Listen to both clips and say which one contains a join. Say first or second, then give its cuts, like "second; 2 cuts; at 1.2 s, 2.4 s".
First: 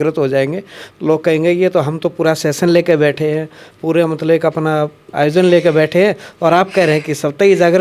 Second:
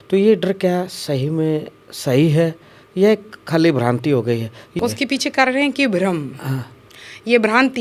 second; 1 cut; at 4.8 s